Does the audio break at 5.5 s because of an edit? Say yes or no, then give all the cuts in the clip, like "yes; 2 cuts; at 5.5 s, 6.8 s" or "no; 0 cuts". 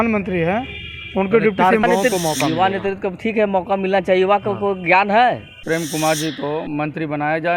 yes; 2 cuts; at 1.8 s, 5.5 s